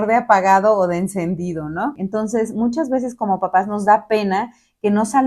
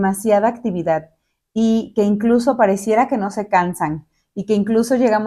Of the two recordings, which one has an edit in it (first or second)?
first